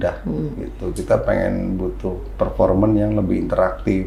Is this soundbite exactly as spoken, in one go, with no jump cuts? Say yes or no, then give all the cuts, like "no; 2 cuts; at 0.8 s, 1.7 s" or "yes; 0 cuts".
yes; 0 cuts